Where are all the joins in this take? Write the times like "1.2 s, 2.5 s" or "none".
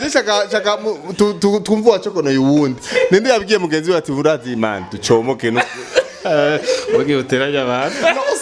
none